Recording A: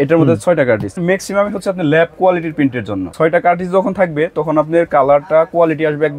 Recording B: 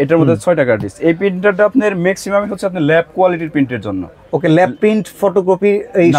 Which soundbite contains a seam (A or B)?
A